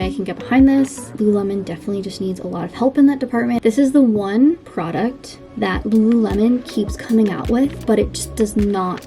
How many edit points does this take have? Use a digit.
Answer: 2